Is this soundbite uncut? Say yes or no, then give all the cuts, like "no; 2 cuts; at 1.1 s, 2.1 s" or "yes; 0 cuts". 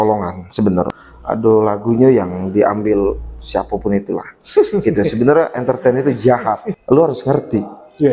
no; 2 cuts; at 1.0 s, 6.7 s